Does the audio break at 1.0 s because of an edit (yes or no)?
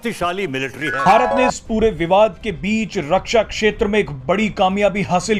yes